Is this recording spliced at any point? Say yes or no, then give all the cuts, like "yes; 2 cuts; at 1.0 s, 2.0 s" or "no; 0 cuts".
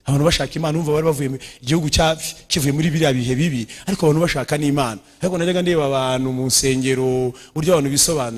no; 0 cuts